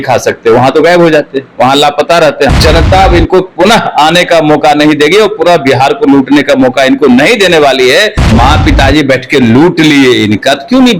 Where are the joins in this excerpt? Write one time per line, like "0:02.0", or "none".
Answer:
0:02.5
0:08.2

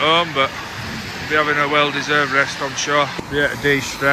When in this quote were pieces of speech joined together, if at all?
0:03.2

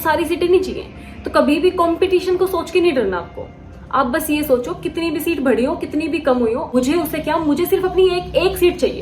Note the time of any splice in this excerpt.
none

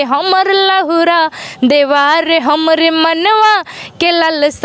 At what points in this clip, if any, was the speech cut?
none

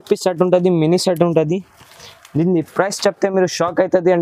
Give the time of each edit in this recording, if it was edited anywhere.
none

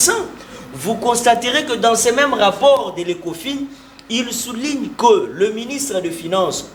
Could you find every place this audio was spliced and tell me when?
none

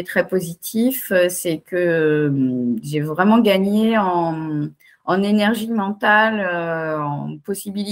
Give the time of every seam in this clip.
none

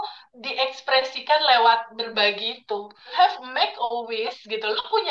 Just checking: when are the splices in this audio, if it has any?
0:03.1

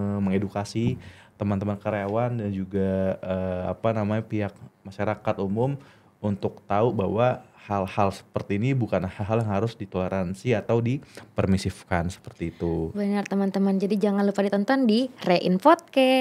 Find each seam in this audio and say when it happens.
none

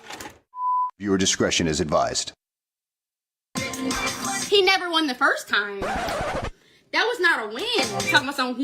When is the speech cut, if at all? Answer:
none

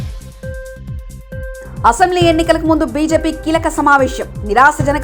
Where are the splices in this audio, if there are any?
0:01.7

